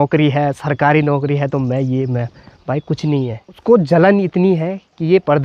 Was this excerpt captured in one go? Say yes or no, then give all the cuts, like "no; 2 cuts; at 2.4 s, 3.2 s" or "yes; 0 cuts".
no; 1 cut; at 3.5 s